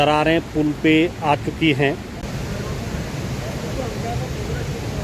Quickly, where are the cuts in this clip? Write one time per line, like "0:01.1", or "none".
0:02.2